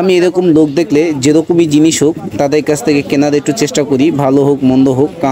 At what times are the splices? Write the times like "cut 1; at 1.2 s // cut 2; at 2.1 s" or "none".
none